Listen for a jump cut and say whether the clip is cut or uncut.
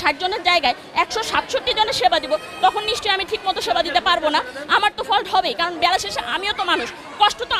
uncut